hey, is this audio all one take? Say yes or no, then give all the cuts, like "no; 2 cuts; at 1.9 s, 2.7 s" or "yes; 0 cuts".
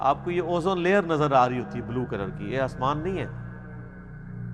yes; 0 cuts